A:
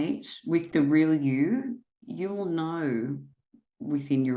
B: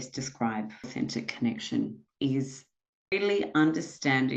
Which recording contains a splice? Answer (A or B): B